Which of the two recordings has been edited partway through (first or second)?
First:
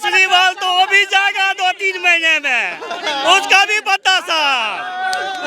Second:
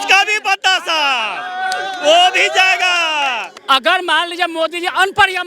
second